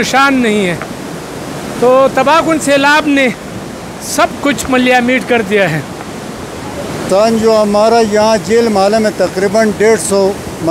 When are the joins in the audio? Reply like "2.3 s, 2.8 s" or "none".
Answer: none